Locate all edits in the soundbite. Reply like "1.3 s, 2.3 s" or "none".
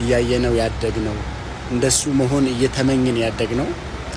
none